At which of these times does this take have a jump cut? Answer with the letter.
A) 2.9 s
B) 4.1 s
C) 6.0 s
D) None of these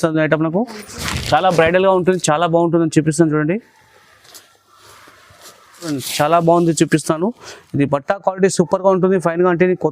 C